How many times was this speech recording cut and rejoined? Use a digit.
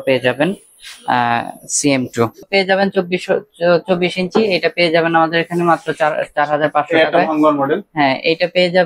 1